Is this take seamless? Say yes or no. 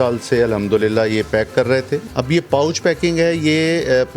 no